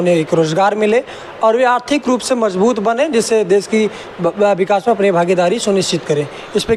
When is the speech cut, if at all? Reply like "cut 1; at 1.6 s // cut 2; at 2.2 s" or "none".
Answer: none